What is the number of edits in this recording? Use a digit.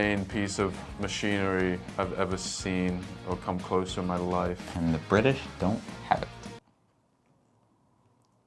0